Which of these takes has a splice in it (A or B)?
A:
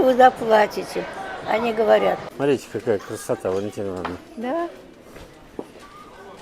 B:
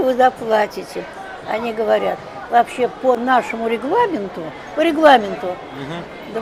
A